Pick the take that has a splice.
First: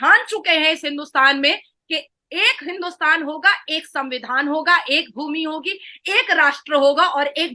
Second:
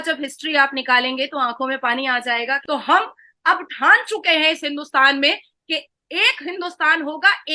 second; 1 cut; at 2.6 s

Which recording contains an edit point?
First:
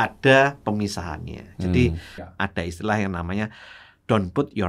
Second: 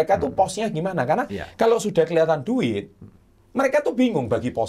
first; 1 cut; at 2.3 s

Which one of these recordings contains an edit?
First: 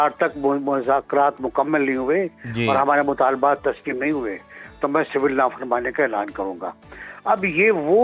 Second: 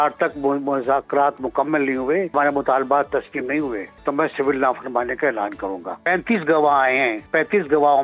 second; 4 cuts; at 2.3 s, 3.9 s, 6.0 s, 7.3 s

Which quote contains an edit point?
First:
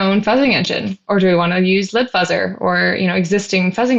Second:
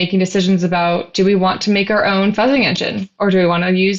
second; 1 cut; at 1.1 s

